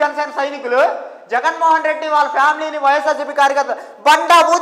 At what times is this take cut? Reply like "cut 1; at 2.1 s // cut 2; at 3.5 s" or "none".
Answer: none